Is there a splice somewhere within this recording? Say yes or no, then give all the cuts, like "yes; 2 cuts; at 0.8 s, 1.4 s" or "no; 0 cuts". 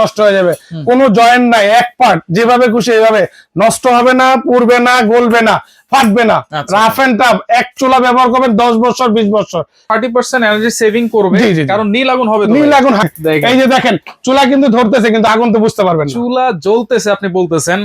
yes; 2 cuts; at 9.9 s, 13.0 s